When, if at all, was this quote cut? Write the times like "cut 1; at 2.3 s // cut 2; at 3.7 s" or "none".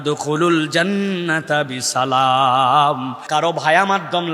cut 1; at 3.2 s